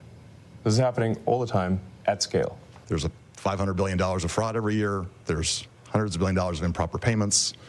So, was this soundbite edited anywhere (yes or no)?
yes